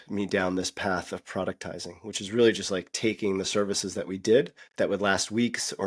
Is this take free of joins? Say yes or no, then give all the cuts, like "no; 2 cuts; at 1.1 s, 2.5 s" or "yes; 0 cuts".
no; 1 cut; at 4.6 s